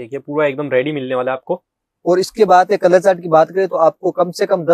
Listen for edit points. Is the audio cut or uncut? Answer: uncut